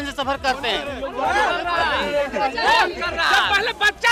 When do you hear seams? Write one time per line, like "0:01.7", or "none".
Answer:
none